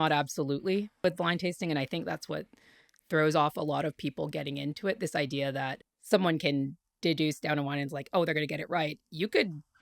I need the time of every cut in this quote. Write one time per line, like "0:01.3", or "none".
0:01.0